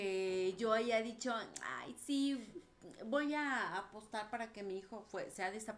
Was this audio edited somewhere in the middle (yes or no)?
no